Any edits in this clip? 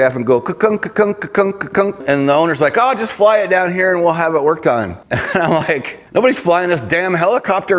yes; 3 cuts; at 2.0 s, 5.0 s, 5.9 s

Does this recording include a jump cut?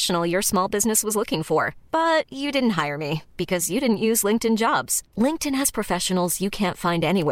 no; 0 cuts

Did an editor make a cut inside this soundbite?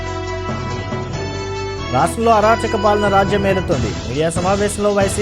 yes; 1 cut; at 1.7 s

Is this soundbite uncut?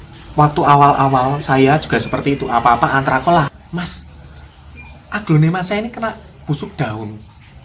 no; 1 cut; at 3.6 s

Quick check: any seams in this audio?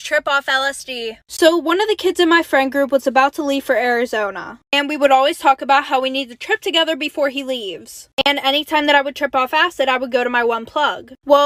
no; 0 cuts

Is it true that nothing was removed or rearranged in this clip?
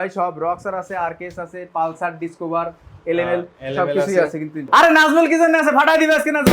no; 1 cut; at 4.6 s

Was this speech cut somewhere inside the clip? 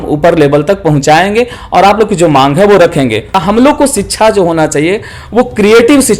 yes; 1 cut; at 3.4 s

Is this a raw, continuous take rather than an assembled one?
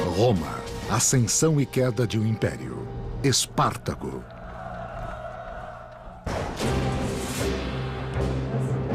yes; 0 cuts

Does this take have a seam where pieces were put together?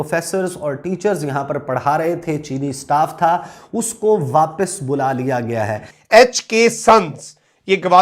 yes; 1 cut; at 5.9 s

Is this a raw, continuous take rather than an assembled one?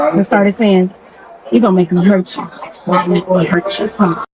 yes; 0 cuts

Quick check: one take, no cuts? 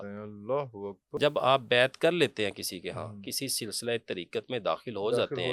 no; 1 cut; at 1.0 s

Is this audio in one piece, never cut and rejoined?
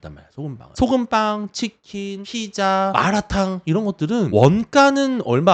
no; 1 cut; at 2.6 s

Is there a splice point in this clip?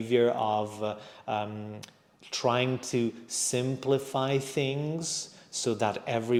no; 0 cuts

